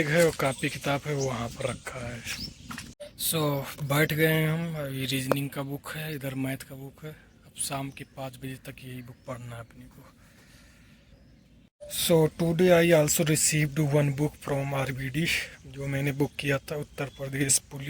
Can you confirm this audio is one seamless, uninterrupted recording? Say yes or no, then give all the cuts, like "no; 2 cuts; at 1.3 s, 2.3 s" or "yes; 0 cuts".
no; 2 cuts; at 3.0 s, 11.7 s